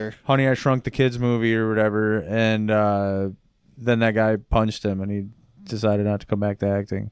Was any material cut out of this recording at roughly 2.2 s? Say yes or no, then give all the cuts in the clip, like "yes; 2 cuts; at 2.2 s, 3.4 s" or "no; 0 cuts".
no; 0 cuts